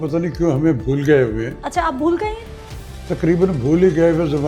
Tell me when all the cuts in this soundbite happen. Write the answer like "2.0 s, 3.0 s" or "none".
none